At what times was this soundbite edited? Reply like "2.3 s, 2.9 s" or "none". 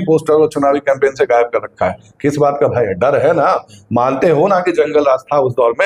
none